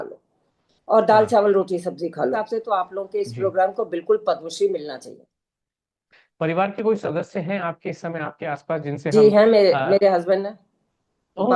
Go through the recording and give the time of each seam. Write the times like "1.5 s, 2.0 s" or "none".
2.3 s, 6.0 s